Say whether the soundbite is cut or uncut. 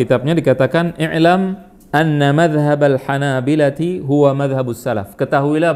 uncut